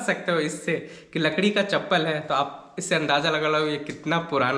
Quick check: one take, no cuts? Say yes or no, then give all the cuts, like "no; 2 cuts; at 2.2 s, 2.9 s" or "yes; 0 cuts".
yes; 0 cuts